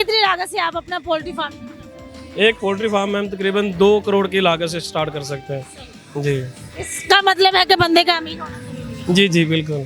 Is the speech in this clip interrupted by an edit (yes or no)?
no